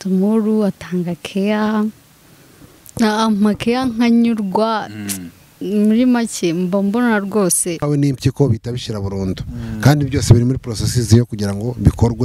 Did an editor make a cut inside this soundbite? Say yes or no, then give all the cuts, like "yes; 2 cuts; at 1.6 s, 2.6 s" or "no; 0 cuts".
yes; 1 cut; at 7.8 s